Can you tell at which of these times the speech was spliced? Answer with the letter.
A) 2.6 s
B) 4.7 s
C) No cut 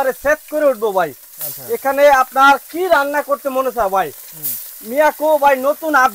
C